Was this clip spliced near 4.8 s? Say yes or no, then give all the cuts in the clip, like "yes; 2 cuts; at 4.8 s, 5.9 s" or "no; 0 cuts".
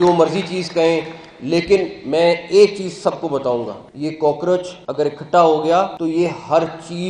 yes; 3 cuts; at 3.8 s, 4.8 s, 5.9 s